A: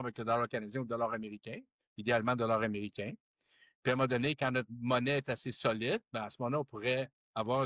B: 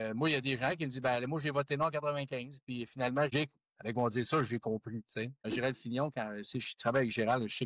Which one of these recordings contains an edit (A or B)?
B